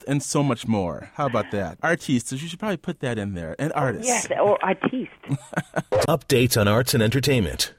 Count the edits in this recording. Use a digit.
2